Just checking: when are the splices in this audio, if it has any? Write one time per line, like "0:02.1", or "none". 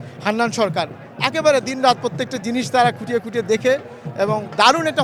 none